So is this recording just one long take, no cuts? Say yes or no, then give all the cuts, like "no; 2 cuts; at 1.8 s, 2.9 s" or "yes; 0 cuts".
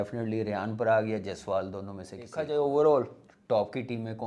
no; 1 cut; at 2.4 s